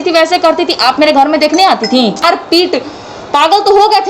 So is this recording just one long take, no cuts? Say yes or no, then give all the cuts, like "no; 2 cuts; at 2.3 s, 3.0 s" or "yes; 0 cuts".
no; 1 cut; at 2.2 s